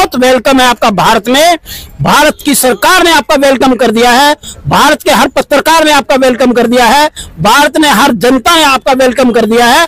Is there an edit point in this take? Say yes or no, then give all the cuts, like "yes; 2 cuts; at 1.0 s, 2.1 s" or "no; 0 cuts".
no; 0 cuts